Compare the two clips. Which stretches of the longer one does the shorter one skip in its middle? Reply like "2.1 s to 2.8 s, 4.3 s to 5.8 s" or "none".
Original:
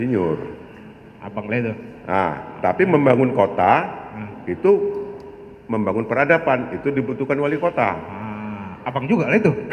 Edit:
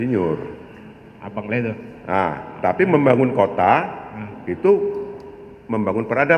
none